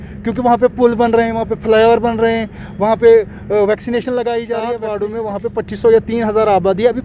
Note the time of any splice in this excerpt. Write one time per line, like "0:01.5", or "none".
0:04.8